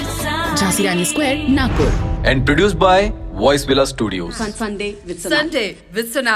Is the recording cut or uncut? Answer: uncut